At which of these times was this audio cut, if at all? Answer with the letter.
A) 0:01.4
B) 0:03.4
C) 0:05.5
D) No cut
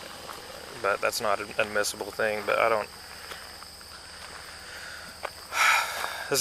D